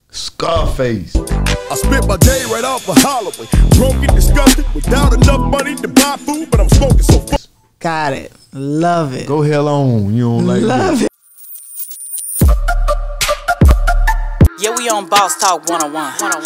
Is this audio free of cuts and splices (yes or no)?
no